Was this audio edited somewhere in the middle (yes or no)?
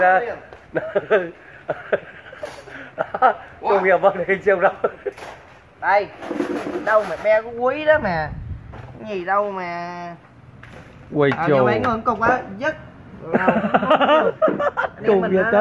yes